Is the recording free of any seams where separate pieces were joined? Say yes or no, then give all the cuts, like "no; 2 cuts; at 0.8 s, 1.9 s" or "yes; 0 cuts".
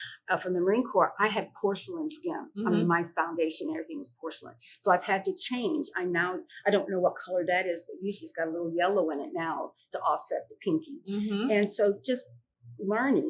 yes; 0 cuts